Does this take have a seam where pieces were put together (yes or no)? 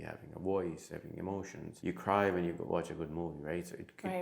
yes